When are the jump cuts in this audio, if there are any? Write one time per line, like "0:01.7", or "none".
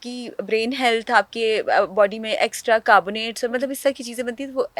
none